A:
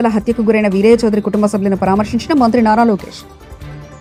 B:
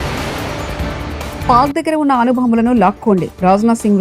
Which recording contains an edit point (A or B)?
B